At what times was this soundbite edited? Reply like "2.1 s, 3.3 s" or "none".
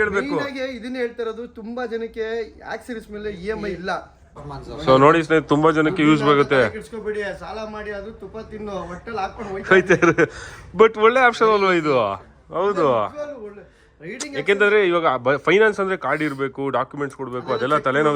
4.4 s